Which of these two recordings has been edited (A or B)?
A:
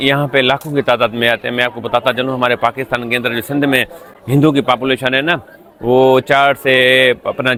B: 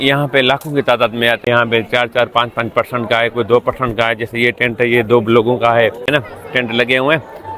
B